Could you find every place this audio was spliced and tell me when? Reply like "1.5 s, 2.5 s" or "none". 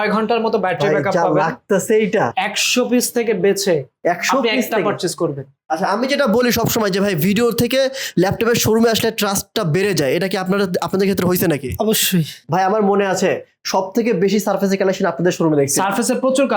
2.3 s, 5.5 s, 12.4 s